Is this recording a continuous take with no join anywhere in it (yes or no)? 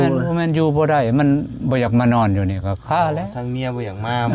yes